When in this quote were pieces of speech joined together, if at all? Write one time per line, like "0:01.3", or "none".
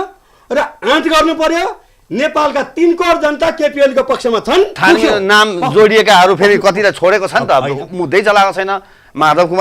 0:04.8